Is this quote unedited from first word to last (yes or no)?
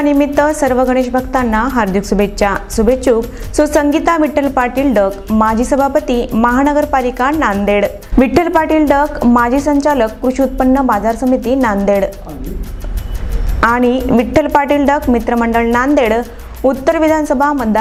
yes